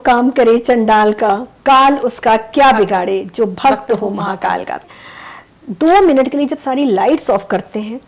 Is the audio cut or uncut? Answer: cut